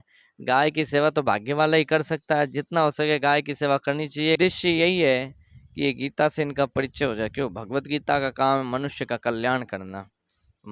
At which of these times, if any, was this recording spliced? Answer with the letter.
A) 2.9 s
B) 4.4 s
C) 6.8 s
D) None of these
B